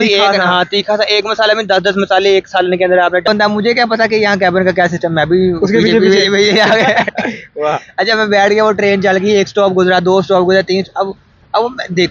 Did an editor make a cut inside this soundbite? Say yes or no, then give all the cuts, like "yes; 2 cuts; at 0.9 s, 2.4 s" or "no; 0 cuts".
yes; 1 cut; at 3.2 s